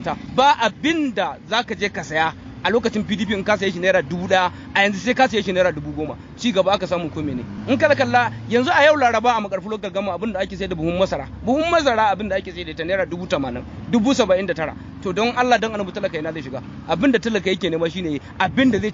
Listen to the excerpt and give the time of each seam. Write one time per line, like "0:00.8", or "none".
none